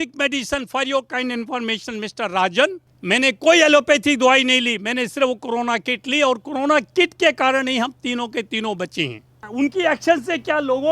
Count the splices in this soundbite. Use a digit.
2